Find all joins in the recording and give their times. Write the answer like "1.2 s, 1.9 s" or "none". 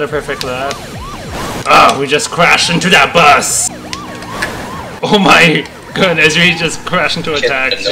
3.6 s